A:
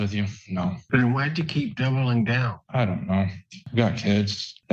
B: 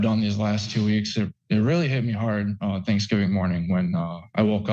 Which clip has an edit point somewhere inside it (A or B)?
A